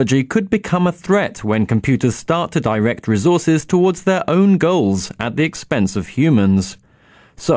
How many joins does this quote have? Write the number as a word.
one